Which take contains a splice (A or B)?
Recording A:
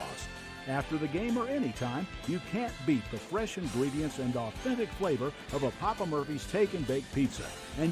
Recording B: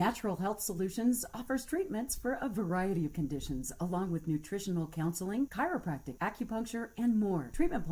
B